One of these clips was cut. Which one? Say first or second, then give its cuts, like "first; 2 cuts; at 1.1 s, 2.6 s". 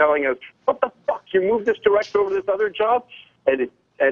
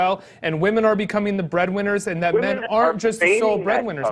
first; 1 cut; at 1.0 s